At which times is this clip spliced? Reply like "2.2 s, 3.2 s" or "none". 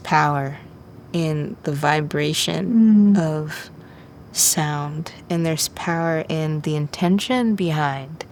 none

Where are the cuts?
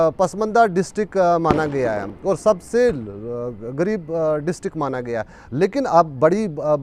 none

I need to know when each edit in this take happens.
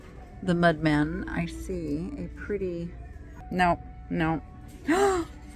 3.3 s

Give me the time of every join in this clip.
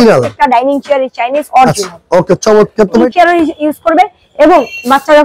3.1 s

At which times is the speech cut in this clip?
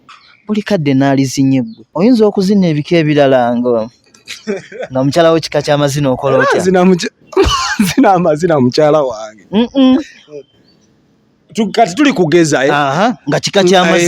1.8 s

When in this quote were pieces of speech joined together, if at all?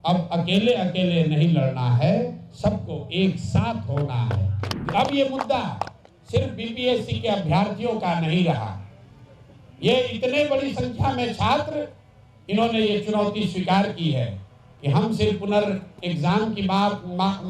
4.7 s

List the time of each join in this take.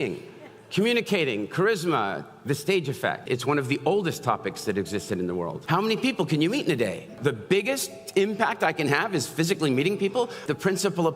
3.2 s, 5.6 s, 7.2 s, 10.4 s

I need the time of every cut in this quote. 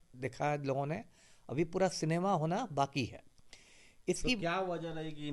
none

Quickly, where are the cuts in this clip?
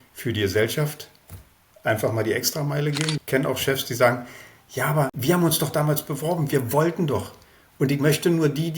3.1 s, 5.2 s

